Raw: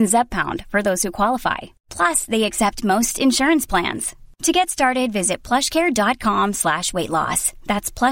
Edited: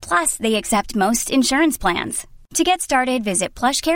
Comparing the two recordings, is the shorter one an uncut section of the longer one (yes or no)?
yes